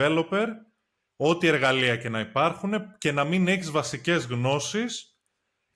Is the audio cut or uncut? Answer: uncut